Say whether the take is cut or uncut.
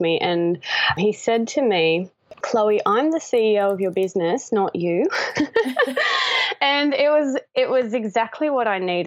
cut